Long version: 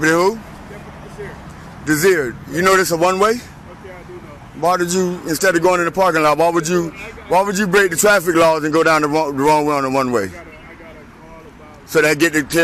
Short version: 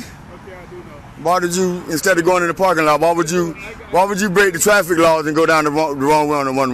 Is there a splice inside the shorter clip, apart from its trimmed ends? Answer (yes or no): no